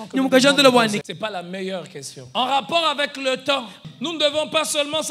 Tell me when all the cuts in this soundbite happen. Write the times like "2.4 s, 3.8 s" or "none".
1.0 s, 2.2 s, 3.8 s